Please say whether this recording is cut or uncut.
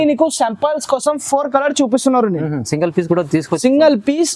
uncut